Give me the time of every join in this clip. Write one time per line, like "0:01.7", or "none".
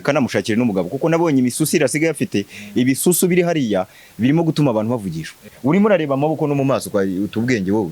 0:05.5